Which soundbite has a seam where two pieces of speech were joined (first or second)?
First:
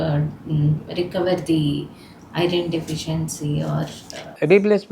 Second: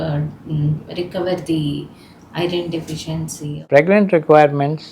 second